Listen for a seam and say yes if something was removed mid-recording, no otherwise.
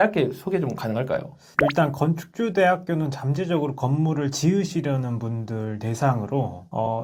no